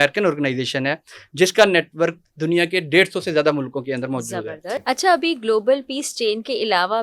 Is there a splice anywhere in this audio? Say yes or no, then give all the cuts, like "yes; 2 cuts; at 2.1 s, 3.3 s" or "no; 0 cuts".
yes; 1 cut; at 4.7 s